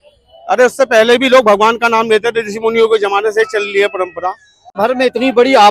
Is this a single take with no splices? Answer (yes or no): no